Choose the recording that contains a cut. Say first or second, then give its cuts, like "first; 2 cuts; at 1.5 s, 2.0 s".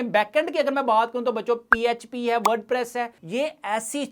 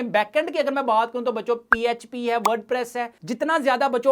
second; 1 cut; at 3.2 s